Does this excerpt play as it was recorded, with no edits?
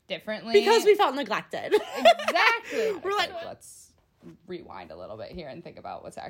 no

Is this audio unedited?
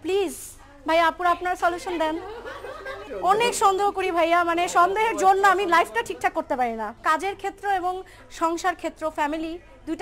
no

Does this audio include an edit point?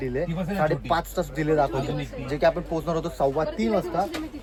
no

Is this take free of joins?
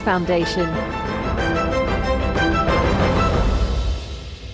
yes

